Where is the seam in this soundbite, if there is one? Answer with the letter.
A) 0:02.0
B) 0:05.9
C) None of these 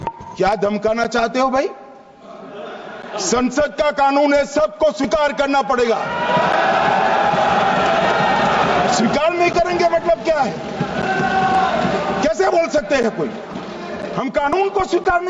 C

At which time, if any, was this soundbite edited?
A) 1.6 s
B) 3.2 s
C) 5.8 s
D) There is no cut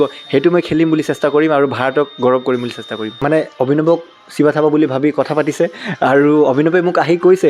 B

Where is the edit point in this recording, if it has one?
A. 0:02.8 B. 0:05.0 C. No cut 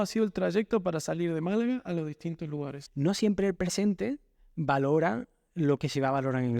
A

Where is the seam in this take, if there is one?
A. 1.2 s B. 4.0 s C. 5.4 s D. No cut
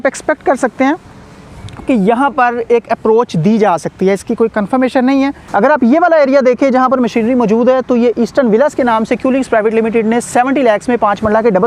C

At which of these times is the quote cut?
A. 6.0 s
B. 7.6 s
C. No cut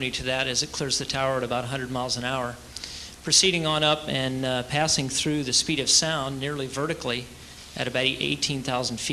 C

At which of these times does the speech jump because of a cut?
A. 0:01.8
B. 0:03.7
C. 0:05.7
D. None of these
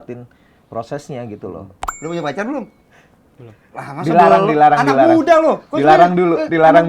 A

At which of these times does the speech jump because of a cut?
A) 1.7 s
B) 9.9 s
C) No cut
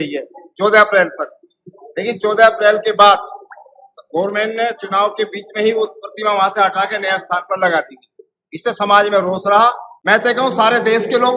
B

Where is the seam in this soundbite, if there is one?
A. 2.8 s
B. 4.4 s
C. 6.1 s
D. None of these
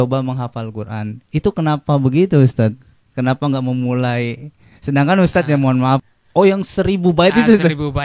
C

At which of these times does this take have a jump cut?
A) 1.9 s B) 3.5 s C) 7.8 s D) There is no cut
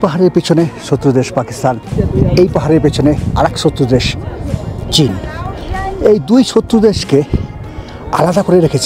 A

